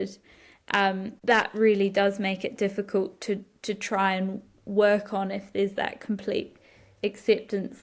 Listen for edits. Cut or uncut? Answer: cut